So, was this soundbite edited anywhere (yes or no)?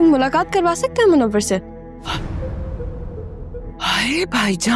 yes